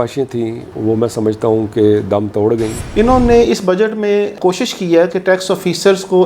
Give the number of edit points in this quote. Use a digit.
2